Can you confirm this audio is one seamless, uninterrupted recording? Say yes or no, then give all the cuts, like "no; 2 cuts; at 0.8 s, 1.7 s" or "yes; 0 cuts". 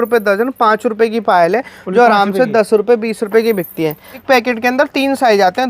no; 1 cut; at 4.2 s